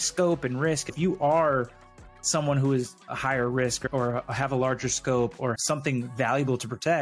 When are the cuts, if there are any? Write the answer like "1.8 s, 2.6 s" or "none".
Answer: 0.9 s